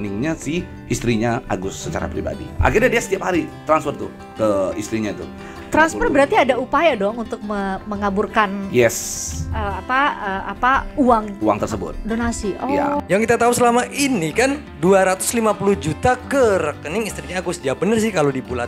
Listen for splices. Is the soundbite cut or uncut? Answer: uncut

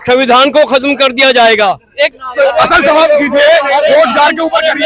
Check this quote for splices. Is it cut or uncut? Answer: cut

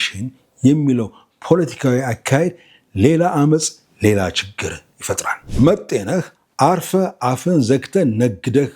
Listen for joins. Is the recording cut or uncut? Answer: cut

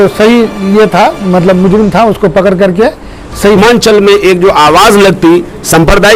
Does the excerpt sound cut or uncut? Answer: cut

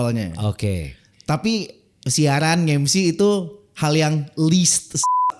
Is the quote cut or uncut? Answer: uncut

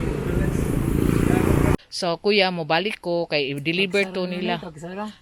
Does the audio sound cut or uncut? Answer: cut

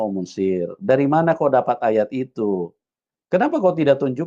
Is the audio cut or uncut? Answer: uncut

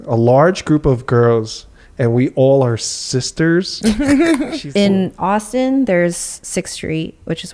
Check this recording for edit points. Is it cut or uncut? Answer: cut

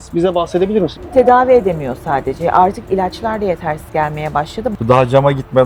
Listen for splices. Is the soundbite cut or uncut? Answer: cut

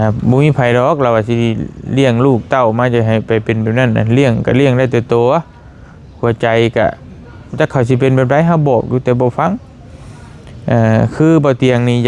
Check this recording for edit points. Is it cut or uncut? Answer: uncut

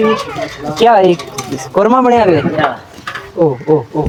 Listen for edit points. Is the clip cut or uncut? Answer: uncut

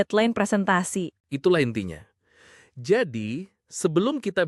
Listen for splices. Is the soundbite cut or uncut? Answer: uncut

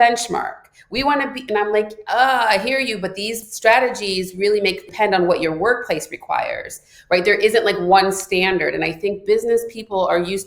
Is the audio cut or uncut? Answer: cut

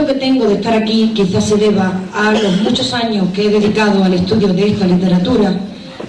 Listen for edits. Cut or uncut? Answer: cut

